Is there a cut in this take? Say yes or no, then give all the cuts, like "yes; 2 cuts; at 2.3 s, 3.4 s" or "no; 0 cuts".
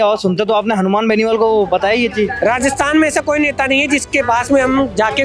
no; 0 cuts